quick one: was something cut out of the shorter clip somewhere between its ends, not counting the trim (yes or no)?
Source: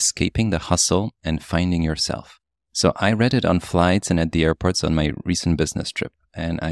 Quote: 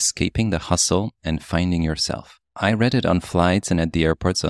yes